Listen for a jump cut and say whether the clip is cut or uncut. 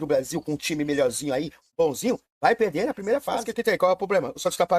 cut